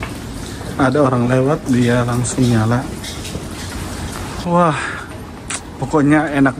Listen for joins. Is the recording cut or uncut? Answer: cut